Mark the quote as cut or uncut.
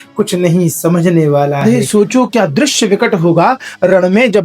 cut